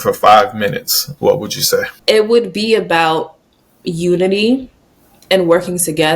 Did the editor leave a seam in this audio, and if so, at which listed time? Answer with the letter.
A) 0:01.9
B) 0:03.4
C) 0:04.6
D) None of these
A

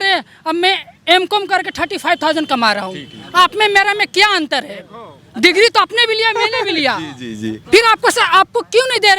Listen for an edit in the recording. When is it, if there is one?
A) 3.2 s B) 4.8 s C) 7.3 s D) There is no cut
D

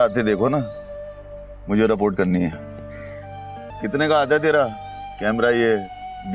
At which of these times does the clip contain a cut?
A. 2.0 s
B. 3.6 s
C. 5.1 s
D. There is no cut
B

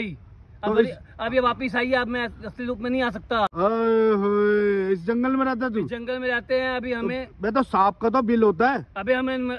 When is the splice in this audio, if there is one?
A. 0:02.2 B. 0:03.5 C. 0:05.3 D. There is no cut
B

